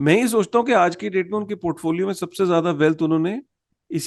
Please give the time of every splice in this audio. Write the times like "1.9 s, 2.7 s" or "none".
none

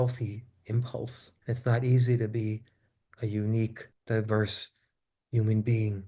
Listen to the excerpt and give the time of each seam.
1.3 s, 3.9 s

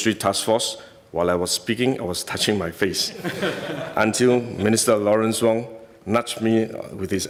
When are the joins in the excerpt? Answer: none

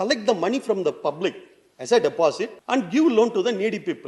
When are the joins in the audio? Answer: 2.5 s

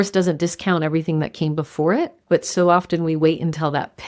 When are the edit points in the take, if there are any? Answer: 2.2 s

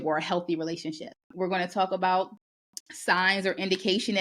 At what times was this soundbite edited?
1.2 s

